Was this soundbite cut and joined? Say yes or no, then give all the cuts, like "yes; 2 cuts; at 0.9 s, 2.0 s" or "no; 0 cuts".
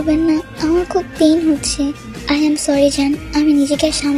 no; 0 cuts